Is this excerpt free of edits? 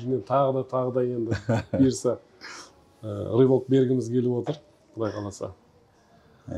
yes; 0 cuts

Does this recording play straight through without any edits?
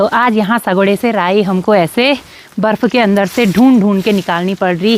yes; 0 cuts

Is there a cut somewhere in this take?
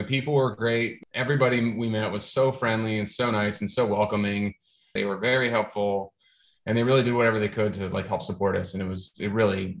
yes; 2 cuts; at 0.9 s, 4.9 s

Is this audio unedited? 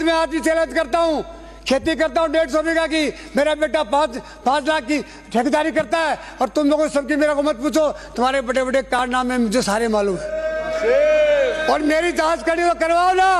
yes; 0 cuts

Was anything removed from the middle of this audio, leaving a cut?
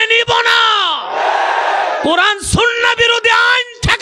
no; 0 cuts

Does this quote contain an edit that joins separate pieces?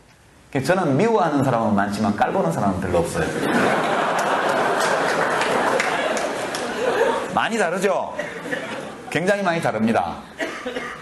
no; 0 cuts

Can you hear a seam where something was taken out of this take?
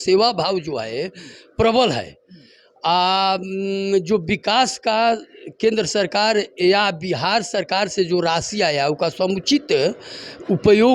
no; 0 cuts

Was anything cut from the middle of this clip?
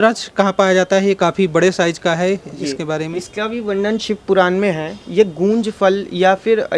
no; 0 cuts

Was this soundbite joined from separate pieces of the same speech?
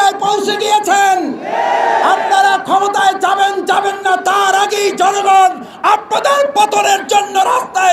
no; 0 cuts

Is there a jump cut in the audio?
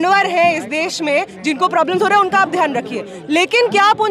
no; 0 cuts

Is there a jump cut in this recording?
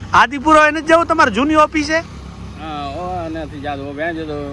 no; 0 cuts

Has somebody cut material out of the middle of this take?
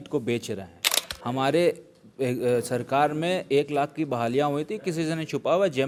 no; 0 cuts

